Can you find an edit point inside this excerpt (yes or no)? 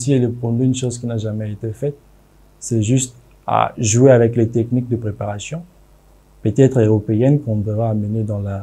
no